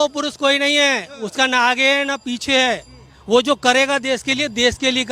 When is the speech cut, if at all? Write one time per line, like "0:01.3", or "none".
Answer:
none